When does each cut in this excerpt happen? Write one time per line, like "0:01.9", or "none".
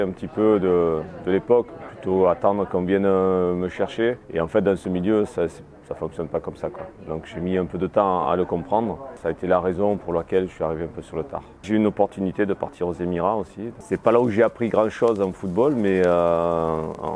0:01.7
0:09.2
0:11.5
0:13.7